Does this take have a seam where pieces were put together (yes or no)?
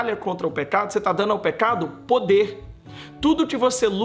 no